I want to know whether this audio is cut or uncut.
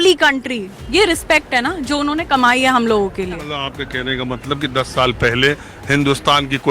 cut